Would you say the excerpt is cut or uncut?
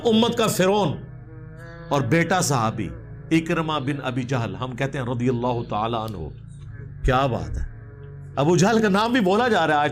uncut